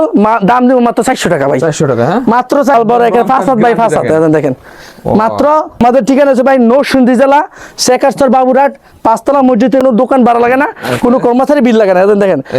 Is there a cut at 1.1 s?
no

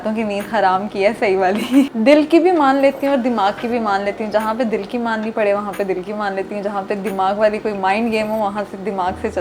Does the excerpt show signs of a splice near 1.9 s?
yes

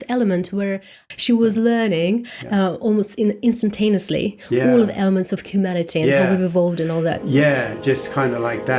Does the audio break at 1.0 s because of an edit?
yes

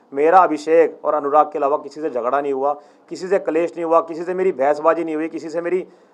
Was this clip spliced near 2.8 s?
no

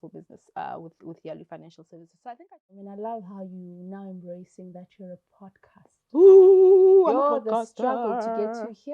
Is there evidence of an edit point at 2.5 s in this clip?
yes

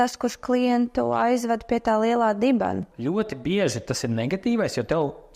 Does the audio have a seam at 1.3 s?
no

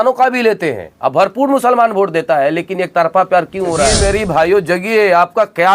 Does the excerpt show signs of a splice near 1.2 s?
no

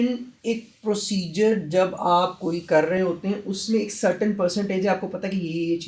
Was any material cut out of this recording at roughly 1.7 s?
no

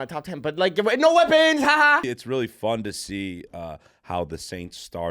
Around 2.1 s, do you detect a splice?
yes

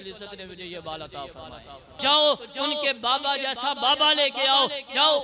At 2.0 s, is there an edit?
yes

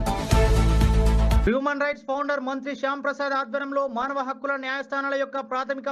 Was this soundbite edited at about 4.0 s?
no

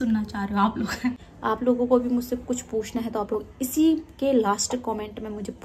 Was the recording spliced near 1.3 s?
yes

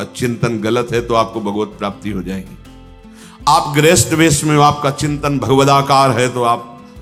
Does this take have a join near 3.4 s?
no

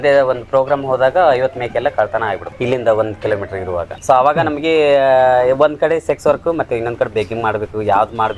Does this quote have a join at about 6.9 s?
no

